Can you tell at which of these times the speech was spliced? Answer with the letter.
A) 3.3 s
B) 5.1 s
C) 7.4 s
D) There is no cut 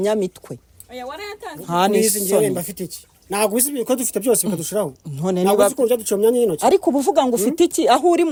D